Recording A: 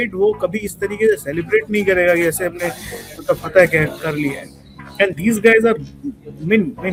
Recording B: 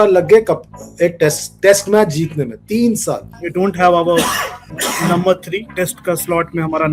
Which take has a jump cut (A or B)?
B